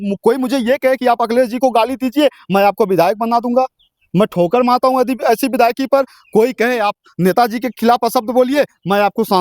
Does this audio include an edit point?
no; 0 cuts

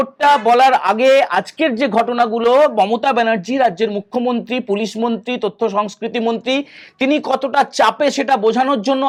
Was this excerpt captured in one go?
yes; 0 cuts

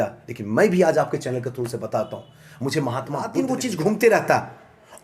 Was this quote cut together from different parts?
yes; 1 cut; at 3.4 s

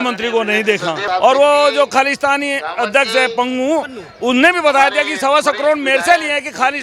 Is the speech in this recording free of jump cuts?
no; 1 cut; at 1.0 s

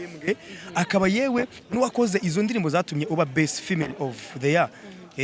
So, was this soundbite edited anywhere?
no; 0 cuts

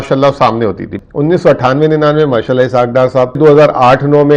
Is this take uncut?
no; 2 cuts; at 1.0 s, 3.4 s

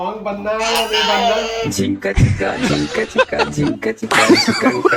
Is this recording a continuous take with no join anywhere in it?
yes; 0 cuts

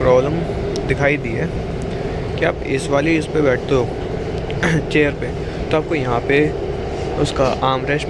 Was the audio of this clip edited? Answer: no; 0 cuts

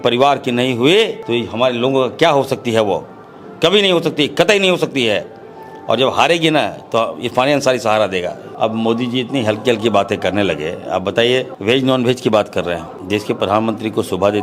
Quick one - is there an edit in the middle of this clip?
yes; 4 cuts; at 1.2 s, 8.4 s, 11.5 s, 12.9 s

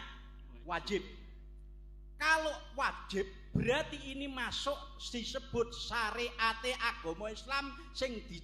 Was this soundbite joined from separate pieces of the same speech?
no; 0 cuts

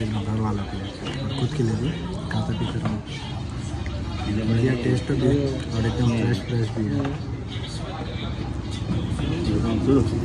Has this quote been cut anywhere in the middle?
no; 0 cuts

